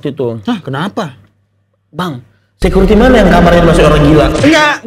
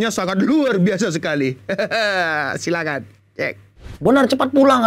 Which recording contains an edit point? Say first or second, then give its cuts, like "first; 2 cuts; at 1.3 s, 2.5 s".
second; 1 cut; at 3.9 s